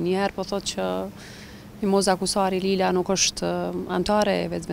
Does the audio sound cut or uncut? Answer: uncut